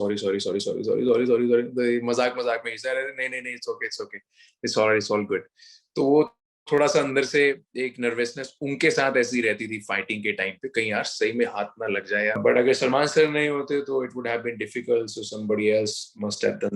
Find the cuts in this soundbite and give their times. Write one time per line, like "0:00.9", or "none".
0:12.4